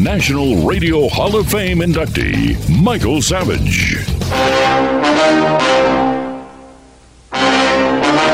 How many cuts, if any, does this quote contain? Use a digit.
1